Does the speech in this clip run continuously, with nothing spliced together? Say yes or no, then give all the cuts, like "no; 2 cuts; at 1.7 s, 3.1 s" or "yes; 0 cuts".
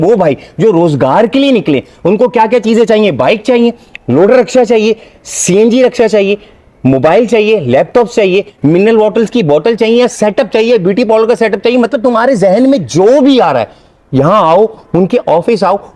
yes; 0 cuts